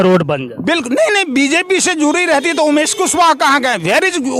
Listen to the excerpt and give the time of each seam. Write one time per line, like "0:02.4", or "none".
none